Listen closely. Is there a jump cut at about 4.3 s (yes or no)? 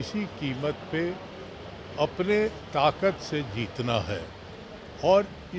no